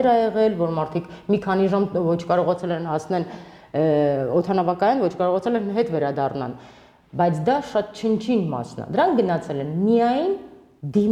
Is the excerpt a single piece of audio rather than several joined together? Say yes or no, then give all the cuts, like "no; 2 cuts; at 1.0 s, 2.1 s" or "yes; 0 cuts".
yes; 0 cuts